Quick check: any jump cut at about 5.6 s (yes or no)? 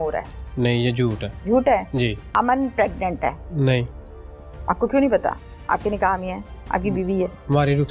no